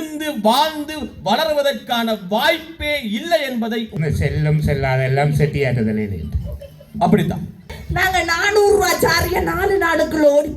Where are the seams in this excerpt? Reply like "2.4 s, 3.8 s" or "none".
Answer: 3.9 s, 7.8 s